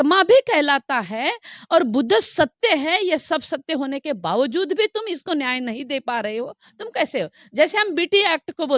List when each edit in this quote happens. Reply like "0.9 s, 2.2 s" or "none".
none